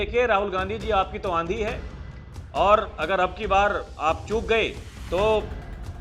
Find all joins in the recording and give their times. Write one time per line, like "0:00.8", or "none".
none